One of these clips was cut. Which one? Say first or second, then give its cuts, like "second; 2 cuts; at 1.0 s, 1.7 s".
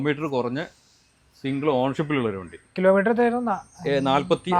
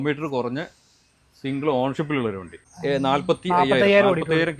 second; 1 cut; at 2.6 s